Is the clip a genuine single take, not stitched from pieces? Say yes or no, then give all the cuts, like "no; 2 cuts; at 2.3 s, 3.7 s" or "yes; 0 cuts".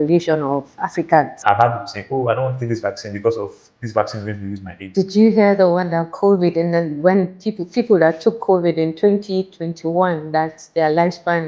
no; 2 cuts; at 1.4 s, 4.7 s